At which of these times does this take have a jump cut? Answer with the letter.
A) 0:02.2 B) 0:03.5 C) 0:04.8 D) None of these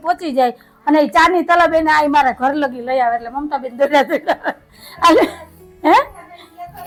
D